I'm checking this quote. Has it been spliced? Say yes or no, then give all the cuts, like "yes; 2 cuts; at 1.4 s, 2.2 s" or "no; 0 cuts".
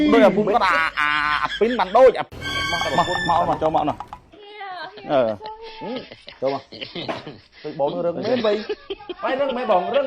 yes; 1 cut; at 2.3 s